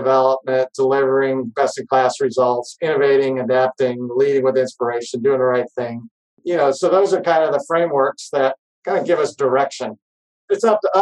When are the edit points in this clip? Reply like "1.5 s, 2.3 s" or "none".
6.4 s